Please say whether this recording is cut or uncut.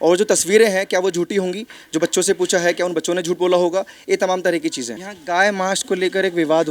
cut